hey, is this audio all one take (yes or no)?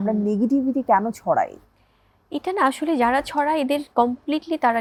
yes